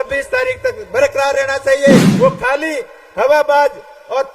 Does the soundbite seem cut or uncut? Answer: cut